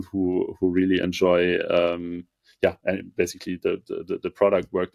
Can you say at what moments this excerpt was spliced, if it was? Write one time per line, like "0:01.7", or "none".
none